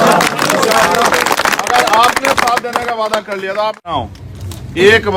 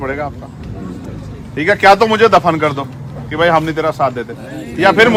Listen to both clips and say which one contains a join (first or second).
first